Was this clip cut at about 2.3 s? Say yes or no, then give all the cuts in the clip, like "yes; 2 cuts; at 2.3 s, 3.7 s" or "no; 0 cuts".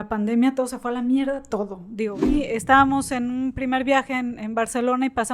yes; 1 cut; at 2.3 s